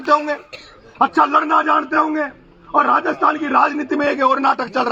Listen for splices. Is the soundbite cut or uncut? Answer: uncut